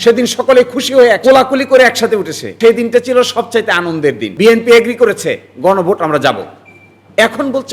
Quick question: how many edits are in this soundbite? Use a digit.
3